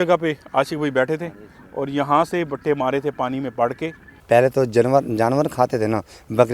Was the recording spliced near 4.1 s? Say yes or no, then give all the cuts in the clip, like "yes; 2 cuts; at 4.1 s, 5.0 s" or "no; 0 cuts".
yes; 1 cut; at 4.1 s